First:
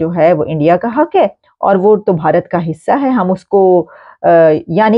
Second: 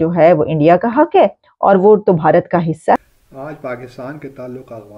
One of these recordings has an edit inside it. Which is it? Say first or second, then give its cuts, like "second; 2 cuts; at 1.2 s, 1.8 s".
second; 1 cut; at 3.0 s